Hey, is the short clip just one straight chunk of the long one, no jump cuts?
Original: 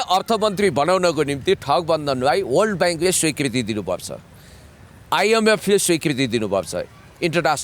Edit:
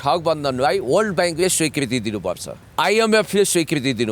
no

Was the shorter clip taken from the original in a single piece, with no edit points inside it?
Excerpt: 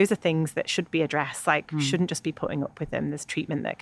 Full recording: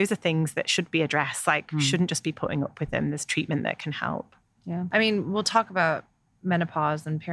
yes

